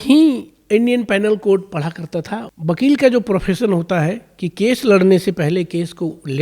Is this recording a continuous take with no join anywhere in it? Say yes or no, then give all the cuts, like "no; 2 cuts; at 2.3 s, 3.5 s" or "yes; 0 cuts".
no; 1 cut; at 2.4 s